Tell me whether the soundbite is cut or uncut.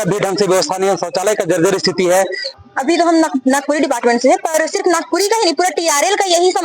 cut